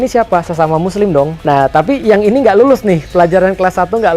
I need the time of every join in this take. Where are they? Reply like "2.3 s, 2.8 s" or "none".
1.4 s